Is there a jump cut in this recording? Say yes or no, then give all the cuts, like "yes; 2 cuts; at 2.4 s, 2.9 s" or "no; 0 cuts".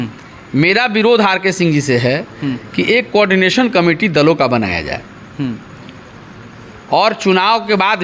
no; 0 cuts